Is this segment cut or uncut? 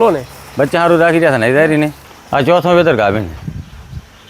cut